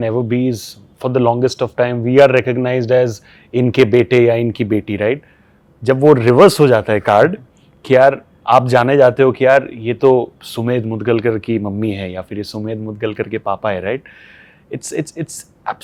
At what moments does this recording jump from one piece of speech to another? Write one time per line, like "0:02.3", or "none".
none